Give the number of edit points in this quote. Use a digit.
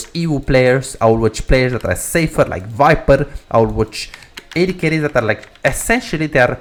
0